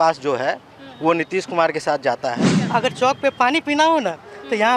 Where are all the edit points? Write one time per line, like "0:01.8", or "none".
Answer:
0:02.5